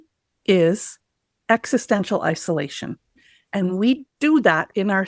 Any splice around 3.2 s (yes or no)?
yes